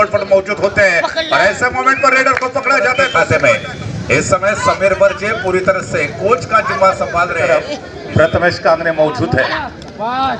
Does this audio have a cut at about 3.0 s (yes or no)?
yes